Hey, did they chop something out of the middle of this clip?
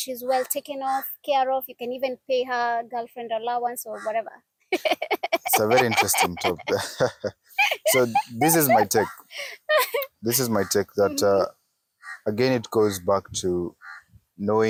no; 0 cuts

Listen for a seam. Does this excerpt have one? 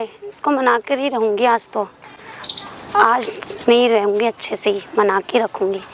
no; 0 cuts

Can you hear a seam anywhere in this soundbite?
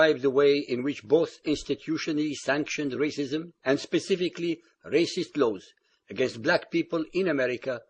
yes; 1 cut; at 4.8 s

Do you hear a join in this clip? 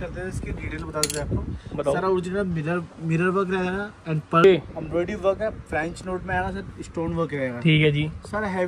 yes; 1 cut; at 4.4 s

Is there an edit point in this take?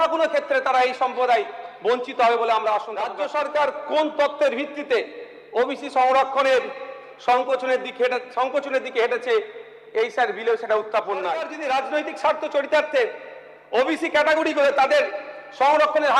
yes; 2 cuts; at 3.1 s, 11.5 s

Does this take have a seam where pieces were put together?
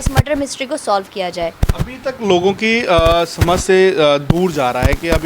no; 0 cuts

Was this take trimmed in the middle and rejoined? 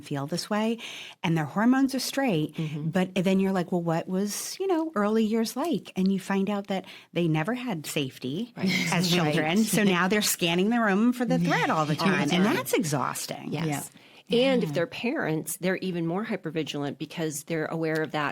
no; 0 cuts

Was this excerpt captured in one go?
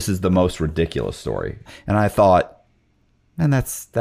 no; 1 cut; at 1.7 s

